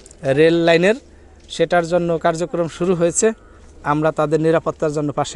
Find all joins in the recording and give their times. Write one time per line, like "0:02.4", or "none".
none